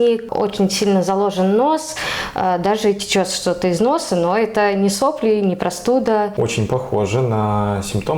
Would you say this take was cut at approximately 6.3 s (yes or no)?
yes